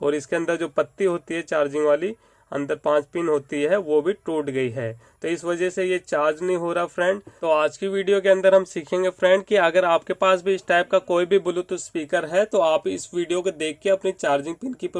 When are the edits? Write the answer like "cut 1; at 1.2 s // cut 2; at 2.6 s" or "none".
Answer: none